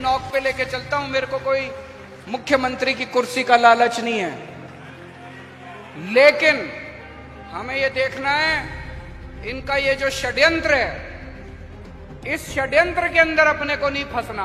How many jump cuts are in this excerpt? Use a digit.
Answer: 0